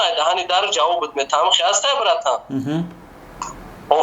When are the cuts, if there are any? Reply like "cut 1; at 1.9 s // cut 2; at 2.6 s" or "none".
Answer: none